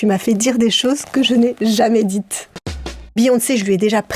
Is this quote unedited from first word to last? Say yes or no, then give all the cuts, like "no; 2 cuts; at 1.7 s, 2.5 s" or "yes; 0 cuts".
no; 1 cut; at 2.9 s